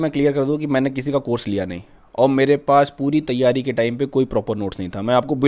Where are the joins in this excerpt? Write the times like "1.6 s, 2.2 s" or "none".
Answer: none